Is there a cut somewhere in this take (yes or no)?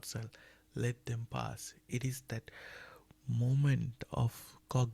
no